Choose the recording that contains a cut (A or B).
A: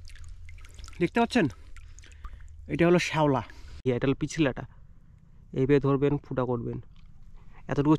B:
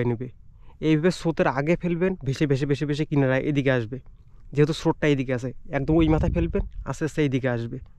A